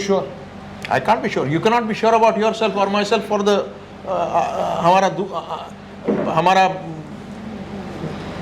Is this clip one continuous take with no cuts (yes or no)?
yes